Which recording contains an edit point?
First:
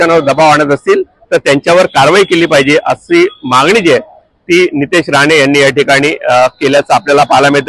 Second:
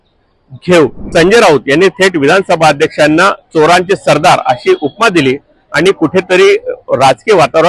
second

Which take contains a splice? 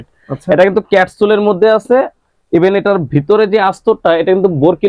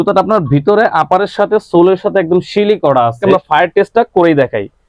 second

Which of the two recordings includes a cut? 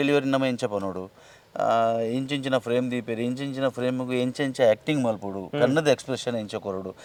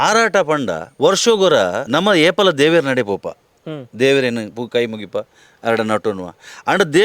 second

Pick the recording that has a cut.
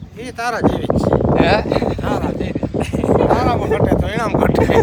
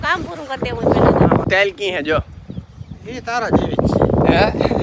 second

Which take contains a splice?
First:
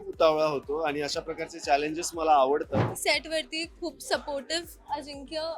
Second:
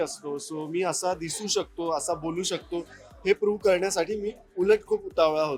first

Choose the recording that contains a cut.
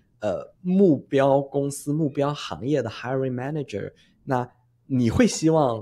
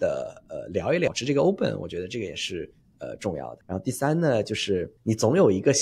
second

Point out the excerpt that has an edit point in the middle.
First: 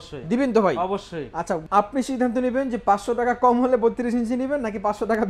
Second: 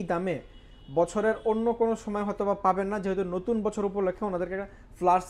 first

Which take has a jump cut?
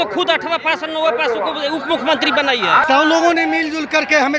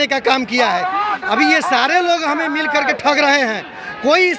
first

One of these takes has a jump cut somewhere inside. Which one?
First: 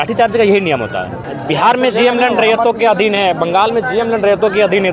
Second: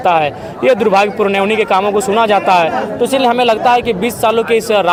first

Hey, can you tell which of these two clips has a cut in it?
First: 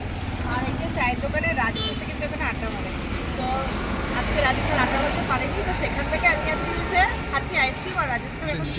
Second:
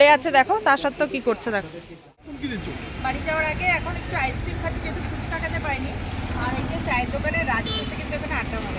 second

